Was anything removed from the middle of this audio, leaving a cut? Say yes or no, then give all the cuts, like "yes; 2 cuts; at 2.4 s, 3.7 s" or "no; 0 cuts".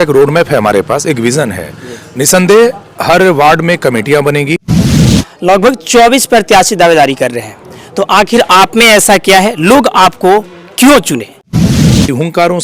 yes; 2 cuts; at 5.0 s, 11.8 s